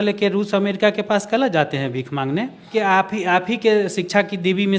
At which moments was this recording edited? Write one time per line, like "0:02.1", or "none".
none